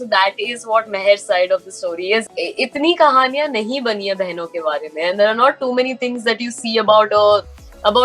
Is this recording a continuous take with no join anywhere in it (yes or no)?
no